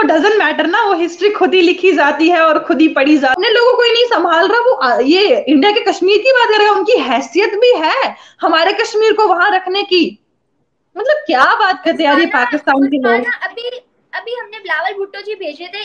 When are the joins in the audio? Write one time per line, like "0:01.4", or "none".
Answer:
0:03.4